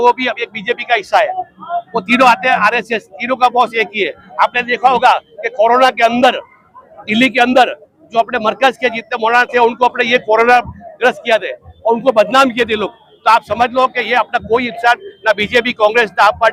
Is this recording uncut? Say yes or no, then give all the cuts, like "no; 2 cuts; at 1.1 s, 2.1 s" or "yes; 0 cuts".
yes; 0 cuts